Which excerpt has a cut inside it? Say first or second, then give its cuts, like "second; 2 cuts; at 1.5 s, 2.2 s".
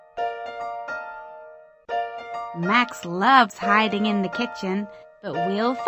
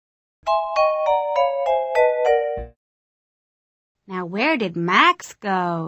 first; 2 cuts; at 1.1 s, 2.1 s